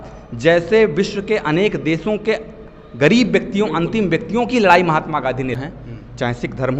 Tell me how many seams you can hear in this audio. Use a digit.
1